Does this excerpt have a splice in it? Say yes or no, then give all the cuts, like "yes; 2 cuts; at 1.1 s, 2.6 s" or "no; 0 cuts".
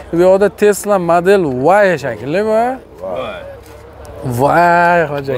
no; 0 cuts